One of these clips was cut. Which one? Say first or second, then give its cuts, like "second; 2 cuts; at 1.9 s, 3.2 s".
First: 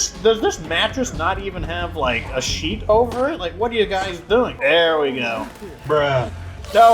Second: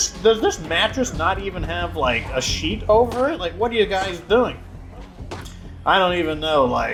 first; 1 cut; at 4.5 s